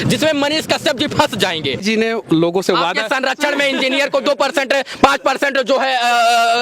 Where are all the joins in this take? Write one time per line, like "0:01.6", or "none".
0:01.8